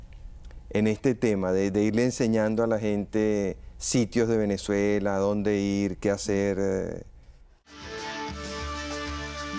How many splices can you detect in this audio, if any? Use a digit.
1